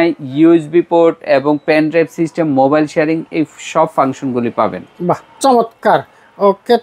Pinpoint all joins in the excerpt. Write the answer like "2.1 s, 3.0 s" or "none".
none